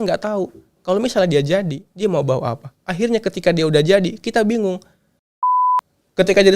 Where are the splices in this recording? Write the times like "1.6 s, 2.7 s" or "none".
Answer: 5.5 s